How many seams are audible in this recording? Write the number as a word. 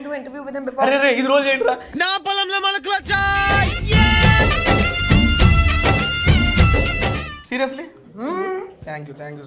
zero